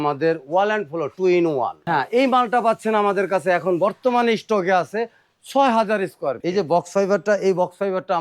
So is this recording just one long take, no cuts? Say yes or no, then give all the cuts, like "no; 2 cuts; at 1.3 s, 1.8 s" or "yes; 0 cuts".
no; 2 cuts; at 1.8 s, 6.4 s